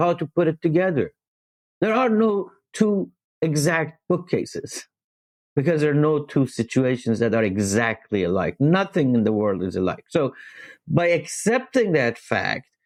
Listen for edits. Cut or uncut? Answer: uncut